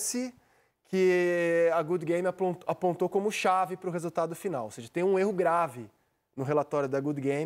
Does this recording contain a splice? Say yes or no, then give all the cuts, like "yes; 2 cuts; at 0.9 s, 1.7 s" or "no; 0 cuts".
no; 0 cuts